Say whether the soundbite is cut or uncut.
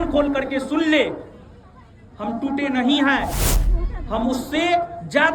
uncut